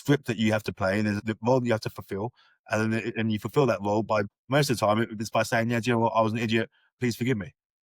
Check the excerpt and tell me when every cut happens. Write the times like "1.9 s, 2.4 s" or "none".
1.2 s, 4.3 s, 6.9 s